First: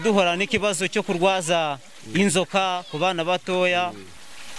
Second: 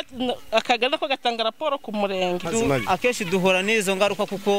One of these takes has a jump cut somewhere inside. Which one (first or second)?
second